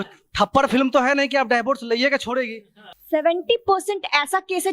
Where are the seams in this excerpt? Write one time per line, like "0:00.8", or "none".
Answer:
0:02.9